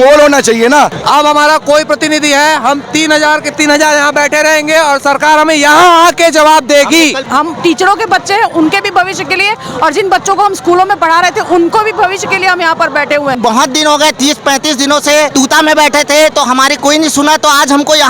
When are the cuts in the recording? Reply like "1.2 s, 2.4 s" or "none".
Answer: 1.0 s, 7.3 s, 13.4 s, 15.3 s